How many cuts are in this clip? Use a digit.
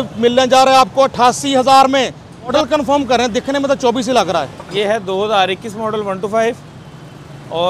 2